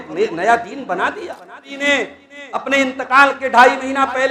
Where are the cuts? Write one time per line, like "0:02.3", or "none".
0:01.7